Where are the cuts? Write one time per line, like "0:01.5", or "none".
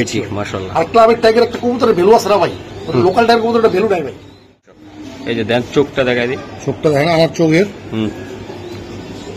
0:04.6